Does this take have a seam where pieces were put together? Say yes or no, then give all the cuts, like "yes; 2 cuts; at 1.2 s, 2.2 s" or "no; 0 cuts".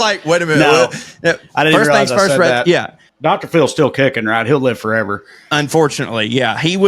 yes; 1 cut; at 3.2 s